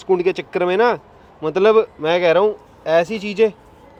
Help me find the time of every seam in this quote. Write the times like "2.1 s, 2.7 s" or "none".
none